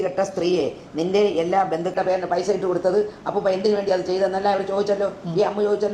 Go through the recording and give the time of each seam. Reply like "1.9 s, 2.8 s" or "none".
2.0 s